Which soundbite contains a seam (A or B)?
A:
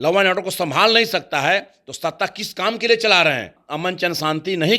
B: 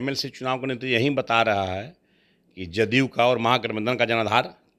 A